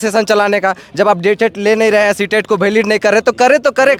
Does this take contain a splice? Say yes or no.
no